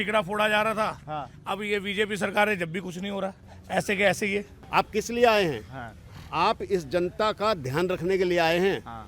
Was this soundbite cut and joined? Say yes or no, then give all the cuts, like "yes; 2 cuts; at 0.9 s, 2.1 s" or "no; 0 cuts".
yes; 1 cut; at 4.6 s